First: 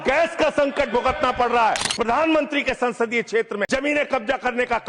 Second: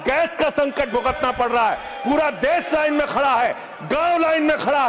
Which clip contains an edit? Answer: first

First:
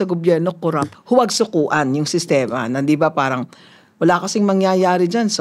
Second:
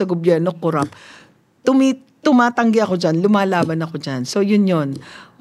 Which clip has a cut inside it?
first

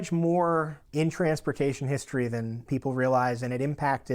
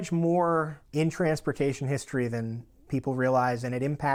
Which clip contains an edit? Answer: first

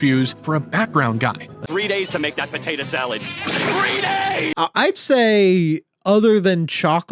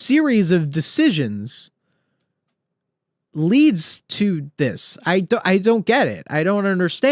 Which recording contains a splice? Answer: first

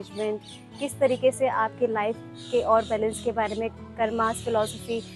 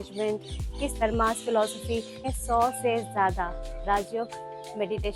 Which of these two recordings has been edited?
second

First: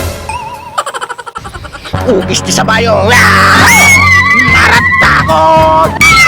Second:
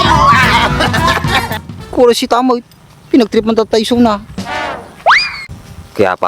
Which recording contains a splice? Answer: second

